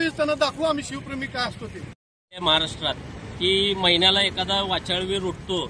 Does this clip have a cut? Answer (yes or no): yes